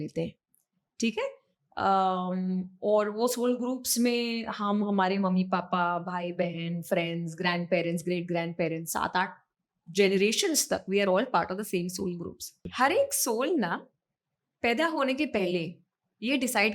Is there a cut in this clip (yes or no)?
yes